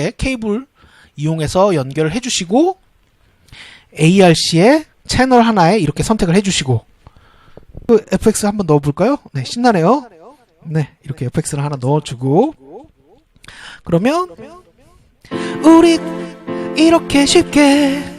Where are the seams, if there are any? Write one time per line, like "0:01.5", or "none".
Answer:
0:07.9